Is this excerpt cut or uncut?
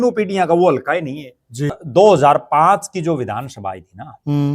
cut